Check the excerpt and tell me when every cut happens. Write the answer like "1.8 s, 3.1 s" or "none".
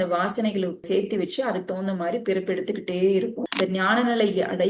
3.4 s